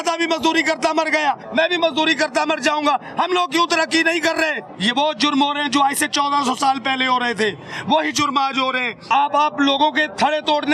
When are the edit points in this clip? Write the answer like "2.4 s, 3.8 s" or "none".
1.4 s, 4.7 s, 9.1 s